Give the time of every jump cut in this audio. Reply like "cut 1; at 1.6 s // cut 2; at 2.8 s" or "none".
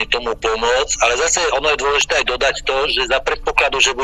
none